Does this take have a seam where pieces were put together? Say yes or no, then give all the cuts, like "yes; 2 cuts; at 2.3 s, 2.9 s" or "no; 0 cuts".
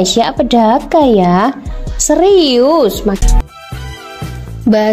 yes; 1 cut; at 3.2 s